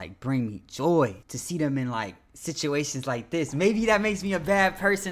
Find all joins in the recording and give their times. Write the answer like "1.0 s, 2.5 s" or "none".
1.3 s